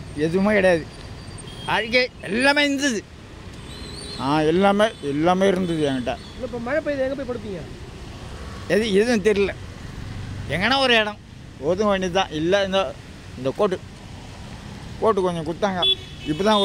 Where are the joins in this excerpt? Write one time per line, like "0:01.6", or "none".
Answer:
none